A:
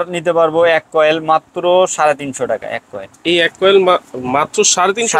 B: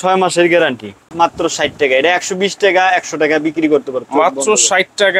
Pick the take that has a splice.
B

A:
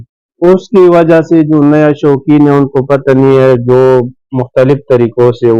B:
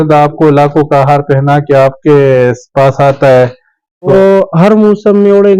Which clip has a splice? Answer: B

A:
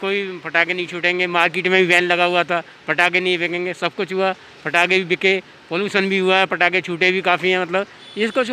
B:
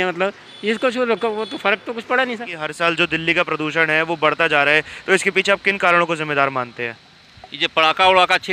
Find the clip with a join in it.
B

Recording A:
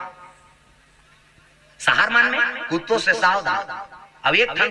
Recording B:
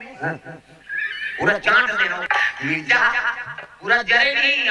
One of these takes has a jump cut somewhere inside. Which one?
B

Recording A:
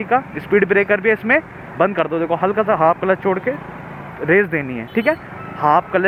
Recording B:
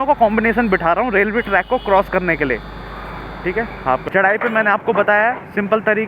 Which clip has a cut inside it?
B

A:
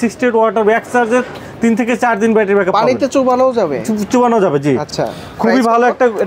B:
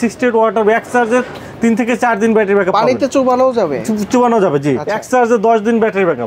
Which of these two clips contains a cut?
B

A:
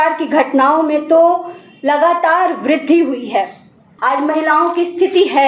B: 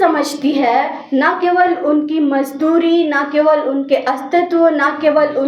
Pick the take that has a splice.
A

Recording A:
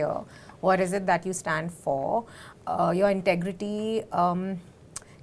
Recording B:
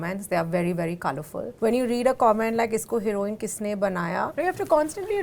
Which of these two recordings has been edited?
B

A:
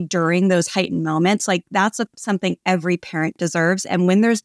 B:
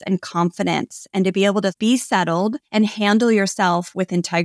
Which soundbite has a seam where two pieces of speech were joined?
B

